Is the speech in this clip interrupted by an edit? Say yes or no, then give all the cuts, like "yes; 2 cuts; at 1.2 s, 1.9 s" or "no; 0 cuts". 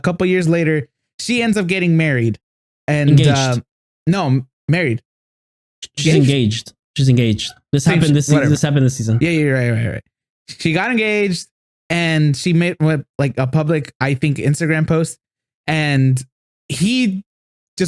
no; 0 cuts